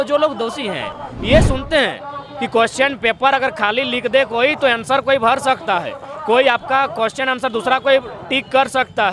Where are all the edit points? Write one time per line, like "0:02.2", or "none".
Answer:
0:01.0